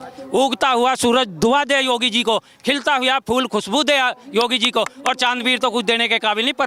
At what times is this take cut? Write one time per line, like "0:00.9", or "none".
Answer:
none